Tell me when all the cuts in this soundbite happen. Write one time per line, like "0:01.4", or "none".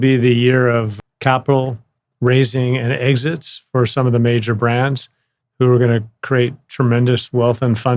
0:00.9